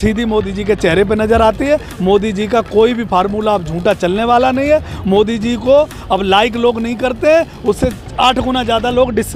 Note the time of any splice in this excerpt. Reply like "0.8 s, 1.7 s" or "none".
none

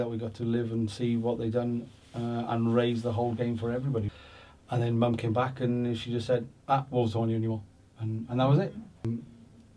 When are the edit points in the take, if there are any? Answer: 4.1 s, 9.0 s

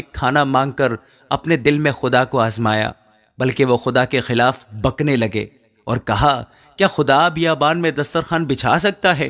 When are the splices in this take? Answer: none

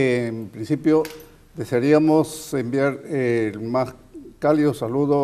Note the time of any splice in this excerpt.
4.1 s

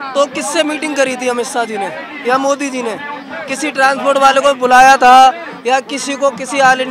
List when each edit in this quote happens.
none

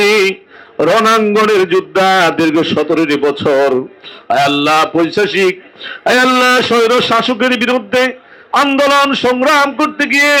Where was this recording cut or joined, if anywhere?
none

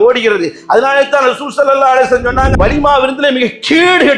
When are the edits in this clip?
2.5 s

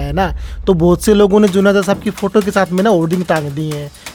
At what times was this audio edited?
none

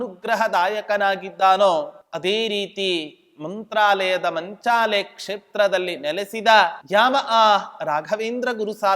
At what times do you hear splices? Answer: 2.0 s, 6.8 s

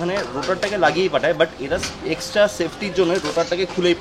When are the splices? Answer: none

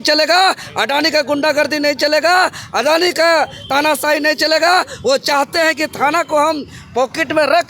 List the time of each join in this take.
none

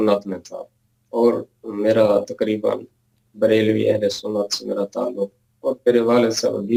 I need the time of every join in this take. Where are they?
none

